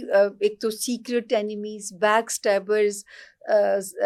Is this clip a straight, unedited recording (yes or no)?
yes